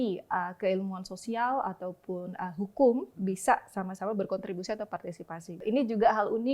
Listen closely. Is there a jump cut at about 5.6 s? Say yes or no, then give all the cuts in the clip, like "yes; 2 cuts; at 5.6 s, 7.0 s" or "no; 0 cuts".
yes; 1 cut; at 5.6 s